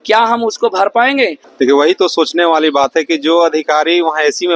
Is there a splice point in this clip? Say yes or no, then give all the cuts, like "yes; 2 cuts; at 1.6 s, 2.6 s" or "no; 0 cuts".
yes; 1 cut; at 1.4 s